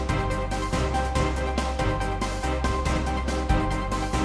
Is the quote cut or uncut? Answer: cut